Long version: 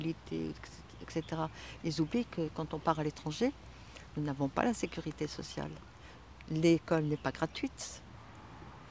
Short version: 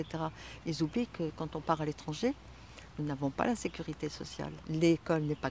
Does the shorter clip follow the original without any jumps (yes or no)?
no